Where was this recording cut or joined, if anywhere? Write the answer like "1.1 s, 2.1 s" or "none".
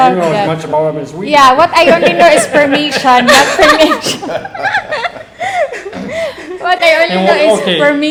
none